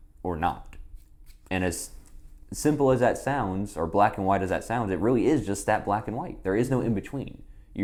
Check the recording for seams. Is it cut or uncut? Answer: uncut